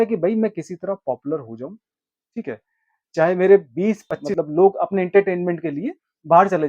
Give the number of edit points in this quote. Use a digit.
1